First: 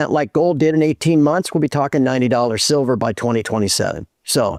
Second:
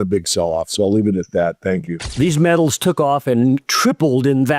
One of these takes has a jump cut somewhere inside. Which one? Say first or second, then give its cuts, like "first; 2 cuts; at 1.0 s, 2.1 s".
second; 1 cut; at 2.0 s